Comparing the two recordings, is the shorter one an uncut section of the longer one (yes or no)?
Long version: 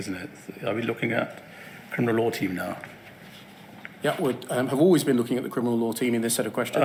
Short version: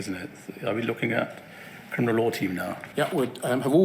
no